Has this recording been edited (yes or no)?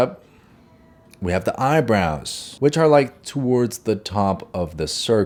no